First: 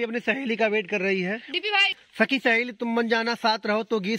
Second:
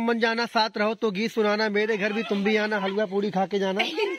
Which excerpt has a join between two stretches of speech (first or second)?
first